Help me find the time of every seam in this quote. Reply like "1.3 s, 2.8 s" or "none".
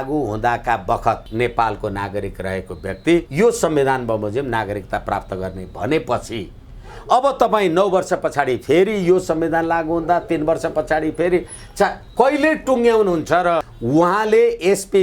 1.2 s, 3.3 s, 13.7 s